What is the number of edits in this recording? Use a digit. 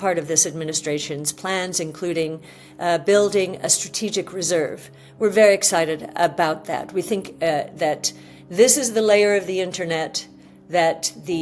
0